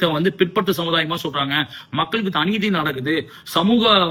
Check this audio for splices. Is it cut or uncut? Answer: uncut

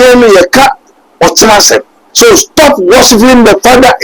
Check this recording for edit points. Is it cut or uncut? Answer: cut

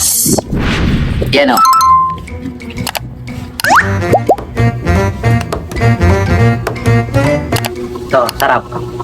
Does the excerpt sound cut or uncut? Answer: cut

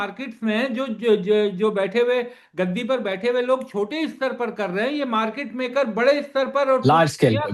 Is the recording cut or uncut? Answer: uncut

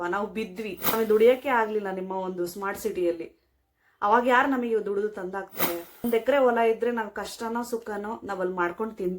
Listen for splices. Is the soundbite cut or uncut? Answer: cut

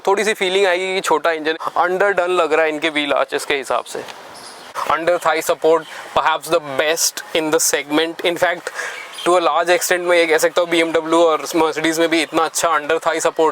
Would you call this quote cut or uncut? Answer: cut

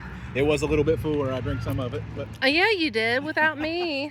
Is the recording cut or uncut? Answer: uncut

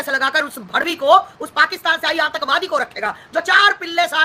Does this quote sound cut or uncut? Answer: uncut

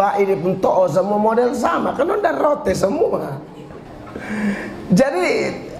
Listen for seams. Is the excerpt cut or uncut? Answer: cut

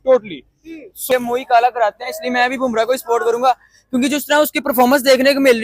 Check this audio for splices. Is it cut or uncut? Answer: cut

